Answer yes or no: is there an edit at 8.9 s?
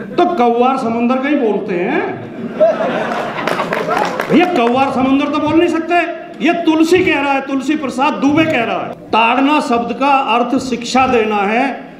yes